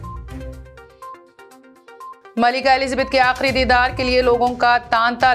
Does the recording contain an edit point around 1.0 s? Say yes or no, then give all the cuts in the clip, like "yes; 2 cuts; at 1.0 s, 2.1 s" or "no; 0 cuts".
yes; 1 cut; at 1.0 s